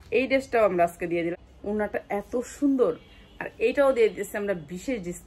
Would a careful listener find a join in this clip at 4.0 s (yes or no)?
no